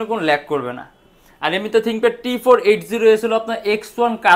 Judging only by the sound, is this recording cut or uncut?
uncut